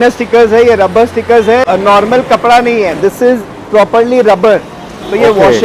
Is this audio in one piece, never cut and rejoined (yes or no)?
no